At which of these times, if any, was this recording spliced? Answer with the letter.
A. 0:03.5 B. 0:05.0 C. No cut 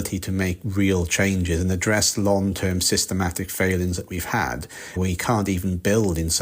B